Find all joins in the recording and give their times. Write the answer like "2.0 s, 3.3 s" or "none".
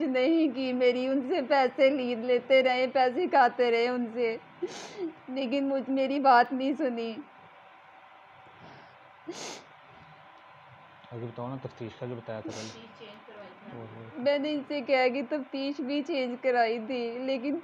none